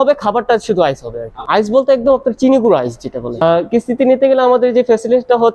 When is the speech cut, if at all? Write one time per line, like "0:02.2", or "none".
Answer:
0:03.3